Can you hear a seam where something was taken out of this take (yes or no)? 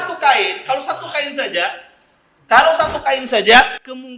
no